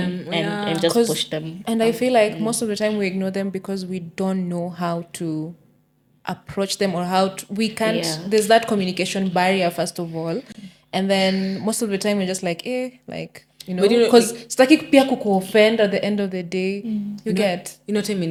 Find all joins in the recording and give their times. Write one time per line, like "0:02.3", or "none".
none

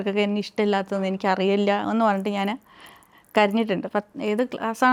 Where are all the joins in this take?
none

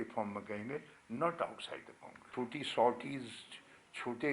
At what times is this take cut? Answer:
0:02.3

